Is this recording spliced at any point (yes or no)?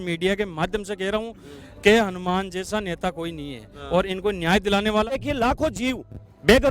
yes